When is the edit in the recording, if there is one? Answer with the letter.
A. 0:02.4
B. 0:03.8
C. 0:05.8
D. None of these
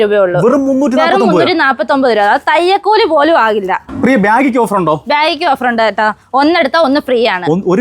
B